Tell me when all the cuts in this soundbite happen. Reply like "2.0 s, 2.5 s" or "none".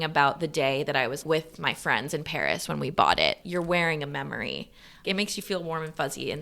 1.2 s, 3.4 s, 5.0 s